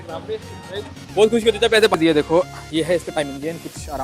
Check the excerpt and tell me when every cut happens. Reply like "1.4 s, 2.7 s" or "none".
1.9 s